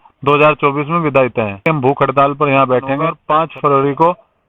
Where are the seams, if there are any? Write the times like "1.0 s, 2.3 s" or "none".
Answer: 1.6 s, 3.2 s

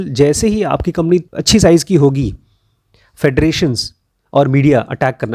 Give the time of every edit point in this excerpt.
1.3 s

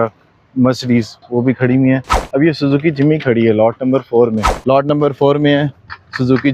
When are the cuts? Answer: 4.5 s

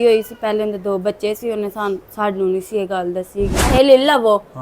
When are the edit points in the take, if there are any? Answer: 3.7 s

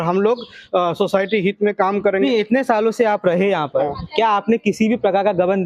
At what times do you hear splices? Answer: 2.2 s

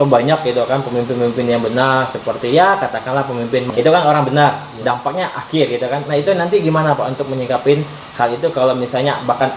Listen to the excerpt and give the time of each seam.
3.7 s

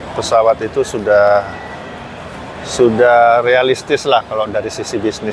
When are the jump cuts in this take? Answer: none

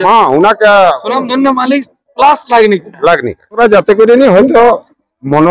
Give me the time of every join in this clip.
3.6 s

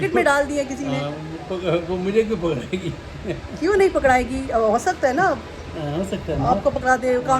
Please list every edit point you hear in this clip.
none

